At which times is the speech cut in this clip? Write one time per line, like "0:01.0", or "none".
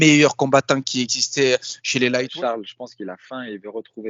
0:02.3

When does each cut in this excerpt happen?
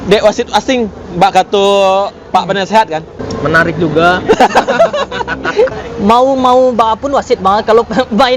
0:03.2
0:05.8

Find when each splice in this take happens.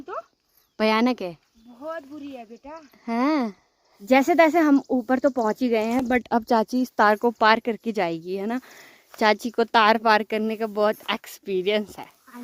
none

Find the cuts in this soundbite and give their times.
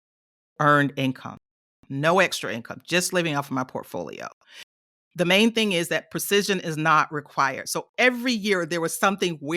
0:04.8

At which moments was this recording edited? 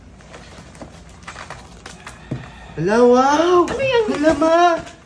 none

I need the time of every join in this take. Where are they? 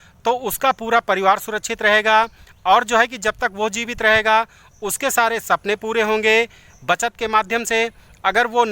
none

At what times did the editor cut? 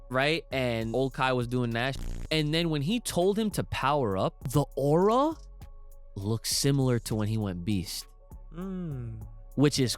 0:00.9
0:02.0
0:04.4

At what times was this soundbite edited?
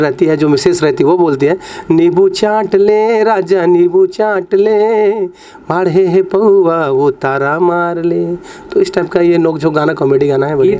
none

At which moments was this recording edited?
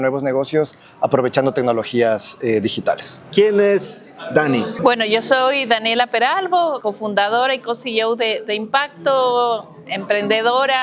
0:03.1
0:04.7
0:06.8

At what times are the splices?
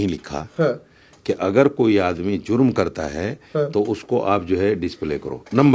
none

